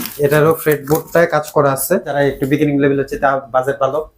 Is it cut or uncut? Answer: cut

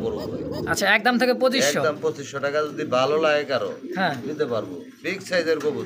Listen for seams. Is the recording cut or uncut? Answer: uncut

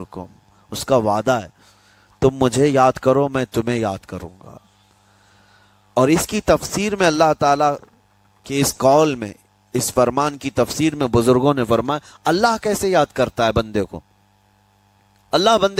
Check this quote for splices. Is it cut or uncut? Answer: uncut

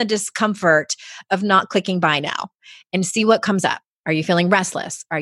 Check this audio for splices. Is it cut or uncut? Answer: cut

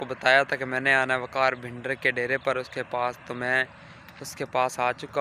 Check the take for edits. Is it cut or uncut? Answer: uncut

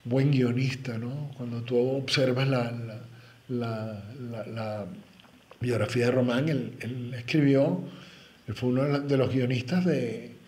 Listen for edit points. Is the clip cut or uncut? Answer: uncut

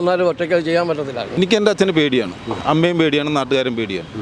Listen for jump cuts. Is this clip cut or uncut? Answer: cut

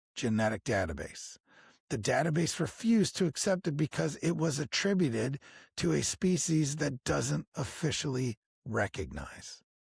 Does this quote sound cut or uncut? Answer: uncut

